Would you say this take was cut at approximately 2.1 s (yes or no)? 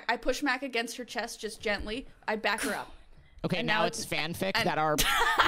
no